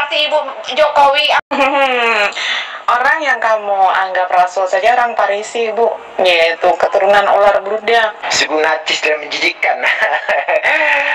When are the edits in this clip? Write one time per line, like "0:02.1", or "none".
0:01.5
0:08.2